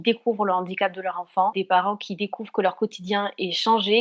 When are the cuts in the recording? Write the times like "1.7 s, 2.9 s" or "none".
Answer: none